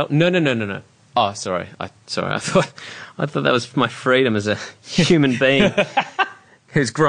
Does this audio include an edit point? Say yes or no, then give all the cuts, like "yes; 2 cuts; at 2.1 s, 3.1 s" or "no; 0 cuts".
yes; 1 cut; at 1.0 s